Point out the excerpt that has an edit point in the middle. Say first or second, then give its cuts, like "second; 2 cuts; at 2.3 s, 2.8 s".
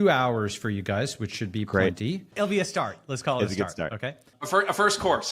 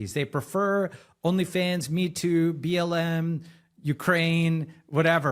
first; 2 cuts; at 2.4 s, 4.4 s